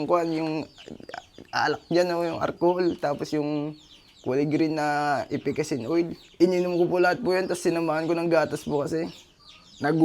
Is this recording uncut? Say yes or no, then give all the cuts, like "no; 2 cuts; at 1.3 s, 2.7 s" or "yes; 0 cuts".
no; 1 cut; at 6.2 s